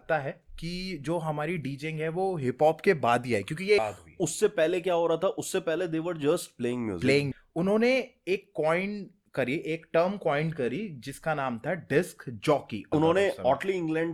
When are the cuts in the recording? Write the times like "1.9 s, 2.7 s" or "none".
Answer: 3.8 s, 7.3 s, 12.9 s